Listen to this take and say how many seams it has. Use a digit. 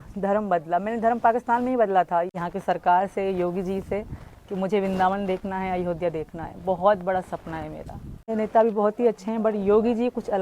2